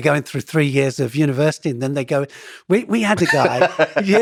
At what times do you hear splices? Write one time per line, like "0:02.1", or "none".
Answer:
none